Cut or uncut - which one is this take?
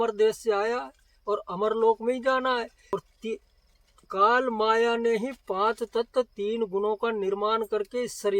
cut